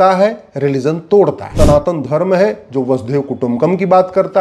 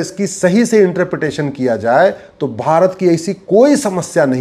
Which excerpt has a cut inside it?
first; 1 cut; at 1.5 s

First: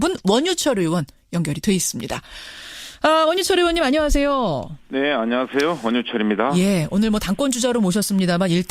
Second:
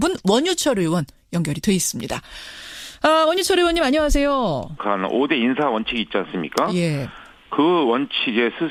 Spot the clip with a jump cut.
first; 1 cut; at 4.8 s

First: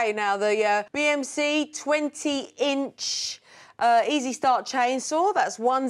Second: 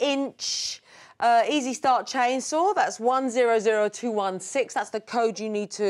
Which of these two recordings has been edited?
first; 1 cut; at 0.9 s

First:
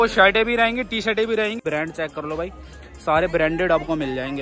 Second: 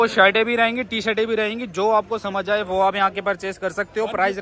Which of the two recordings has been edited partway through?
first; 1 cut; at 1.6 s

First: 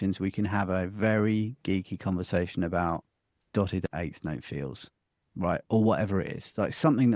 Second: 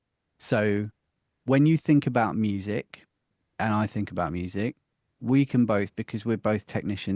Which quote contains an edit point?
first; 1 cut; at 3.9 s

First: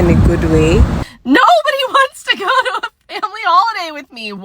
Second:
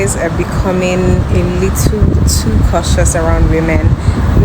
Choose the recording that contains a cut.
first; 1 cut; at 1.0 s

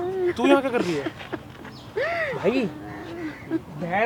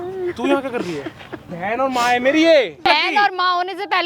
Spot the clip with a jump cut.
second; 2 cuts; at 1.4 s, 2.9 s

